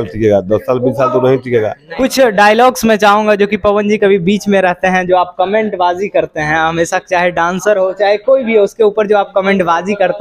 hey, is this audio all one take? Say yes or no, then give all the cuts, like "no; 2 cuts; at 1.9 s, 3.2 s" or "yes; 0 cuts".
no; 1 cut; at 1.8 s